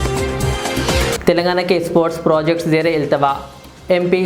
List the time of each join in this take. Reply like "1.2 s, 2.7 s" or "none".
1.1 s